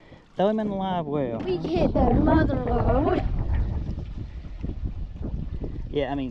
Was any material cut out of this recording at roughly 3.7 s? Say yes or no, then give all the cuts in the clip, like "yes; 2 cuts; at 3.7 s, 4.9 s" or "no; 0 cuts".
no; 1 cut; at 1.5 s